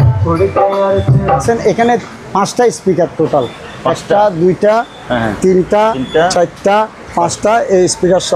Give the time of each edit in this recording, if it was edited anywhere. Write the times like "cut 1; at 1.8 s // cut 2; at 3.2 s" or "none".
cut 1; at 1.4 s